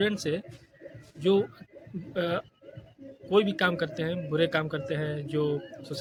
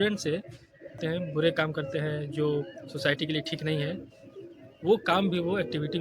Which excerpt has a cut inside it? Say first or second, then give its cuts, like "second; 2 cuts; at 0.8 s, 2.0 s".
second; 1 cut; at 1.0 s